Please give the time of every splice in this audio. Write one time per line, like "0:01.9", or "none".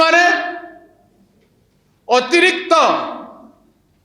none